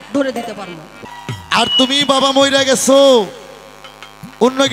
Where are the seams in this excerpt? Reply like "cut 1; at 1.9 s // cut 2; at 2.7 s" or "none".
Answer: cut 1; at 1.0 s